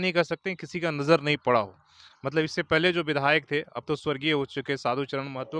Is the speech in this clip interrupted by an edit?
no; 0 cuts

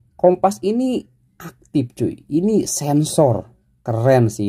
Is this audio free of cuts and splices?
yes; 0 cuts

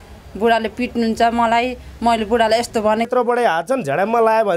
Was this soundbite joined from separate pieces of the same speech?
yes; 1 cut; at 3.1 s

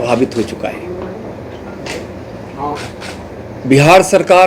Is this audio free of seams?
yes; 0 cuts

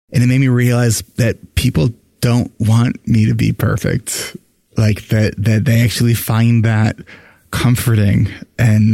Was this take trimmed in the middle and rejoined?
no; 0 cuts

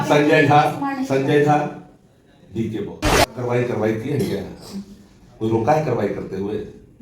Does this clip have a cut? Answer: yes; 1 cut; at 3.4 s

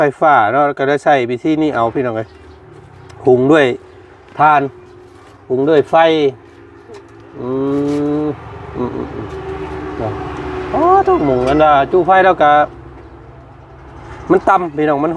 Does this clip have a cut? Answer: no; 0 cuts

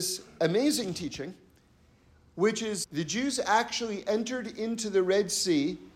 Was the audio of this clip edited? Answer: yes; 1 cut; at 2.8 s

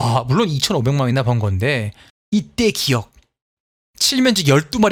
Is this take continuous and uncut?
yes; 0 cuts

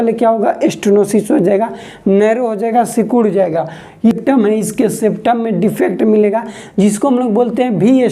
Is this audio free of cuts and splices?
no; 1 cut; at 4.1 s

